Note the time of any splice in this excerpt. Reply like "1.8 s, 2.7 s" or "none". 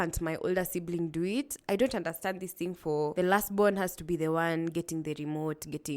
3.1 s